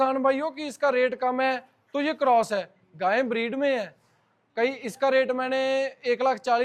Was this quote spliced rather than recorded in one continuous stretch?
no; 0 cuts

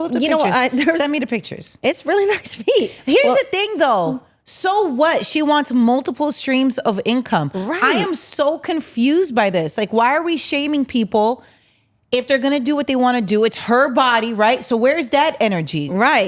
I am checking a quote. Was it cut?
no; 0 cuts

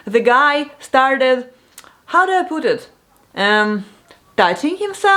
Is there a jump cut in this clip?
no; 0 cuts

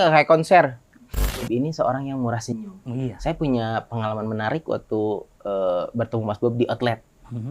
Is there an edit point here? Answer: yes; 1 cut; at 1.2 s

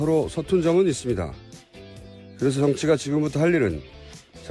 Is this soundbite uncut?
yes; 0 cuts

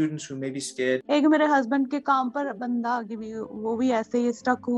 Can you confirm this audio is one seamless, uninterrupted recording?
no; 1 cut; at 1.0 s

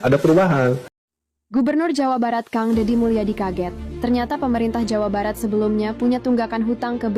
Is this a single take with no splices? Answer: no; 1 cut; at 0.9 s

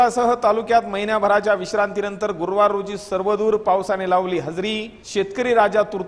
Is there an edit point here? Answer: no; 0 cuts

